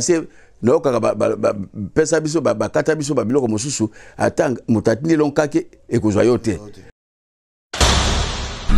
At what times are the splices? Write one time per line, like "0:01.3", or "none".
0:07.0